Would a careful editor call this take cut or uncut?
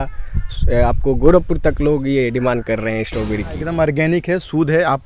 cut